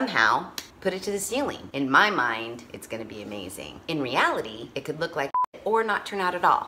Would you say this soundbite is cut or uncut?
cut